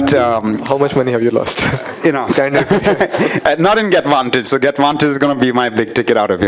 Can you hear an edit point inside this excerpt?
no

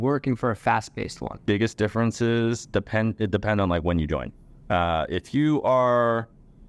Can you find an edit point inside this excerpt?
no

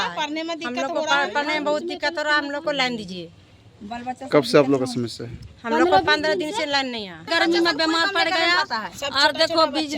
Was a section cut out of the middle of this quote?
yes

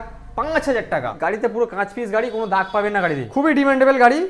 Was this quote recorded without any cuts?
no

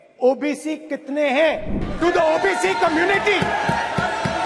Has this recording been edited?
yes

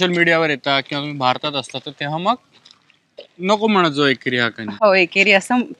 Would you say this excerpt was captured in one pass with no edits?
yes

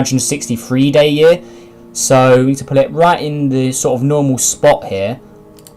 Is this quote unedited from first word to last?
no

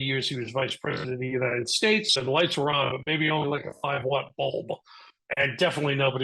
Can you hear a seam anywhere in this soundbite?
yes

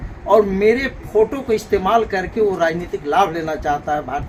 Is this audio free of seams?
yes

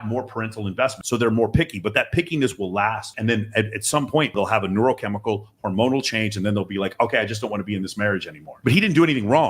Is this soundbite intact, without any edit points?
no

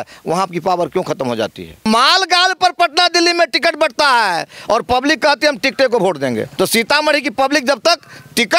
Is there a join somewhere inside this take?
yes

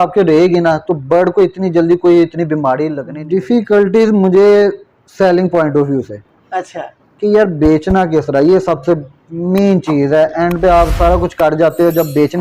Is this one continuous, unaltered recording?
no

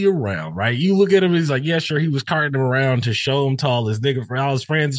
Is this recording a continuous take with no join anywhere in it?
yes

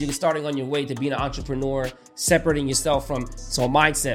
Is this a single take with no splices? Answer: yes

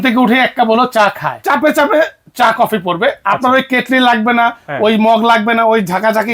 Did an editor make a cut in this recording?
yes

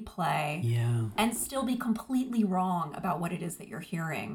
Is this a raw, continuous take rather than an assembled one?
yes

